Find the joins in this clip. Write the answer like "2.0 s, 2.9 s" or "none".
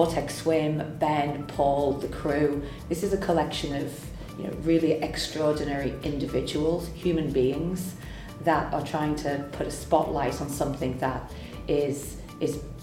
2.8 s